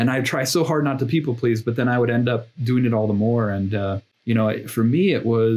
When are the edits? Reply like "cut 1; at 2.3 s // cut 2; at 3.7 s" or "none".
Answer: cut 1; at 4.1 s